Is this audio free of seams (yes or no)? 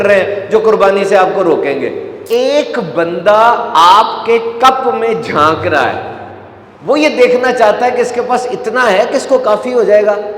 no